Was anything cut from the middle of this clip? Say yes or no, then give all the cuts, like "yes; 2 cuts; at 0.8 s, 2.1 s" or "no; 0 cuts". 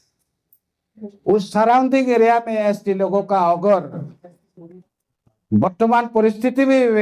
no; 0 cuts